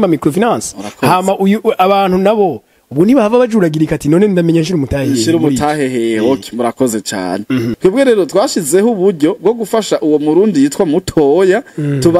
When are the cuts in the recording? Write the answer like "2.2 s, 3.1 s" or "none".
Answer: 7.7 s